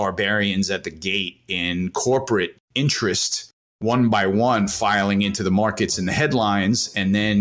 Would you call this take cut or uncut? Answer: cut